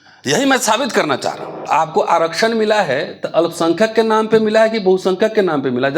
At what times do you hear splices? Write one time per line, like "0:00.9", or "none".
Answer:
0:01.6